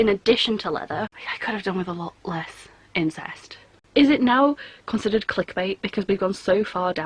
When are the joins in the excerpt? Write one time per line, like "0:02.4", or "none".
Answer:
0:01.1
0:03.8